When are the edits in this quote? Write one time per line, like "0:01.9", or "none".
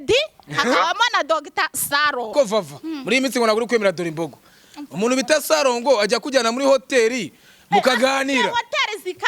0:02.3